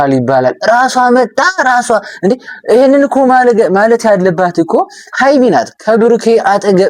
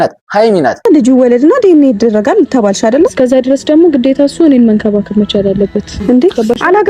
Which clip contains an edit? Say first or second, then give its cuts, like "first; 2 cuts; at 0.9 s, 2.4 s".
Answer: second; 2 cuts; at 0.9 s, 5.9 s